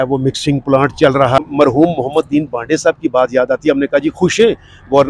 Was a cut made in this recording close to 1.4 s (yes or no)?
yes